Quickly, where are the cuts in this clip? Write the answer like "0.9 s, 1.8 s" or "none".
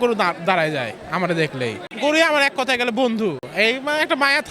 1.9 s, 3.4 s